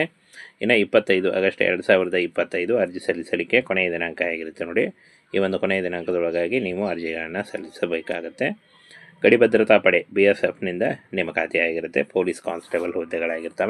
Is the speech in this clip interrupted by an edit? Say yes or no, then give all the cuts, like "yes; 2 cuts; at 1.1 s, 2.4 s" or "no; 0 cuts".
no; 0 cuts